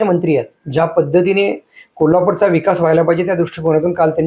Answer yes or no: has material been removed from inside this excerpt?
no